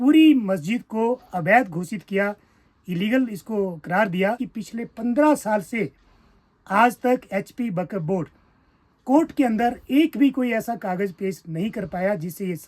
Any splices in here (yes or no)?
yes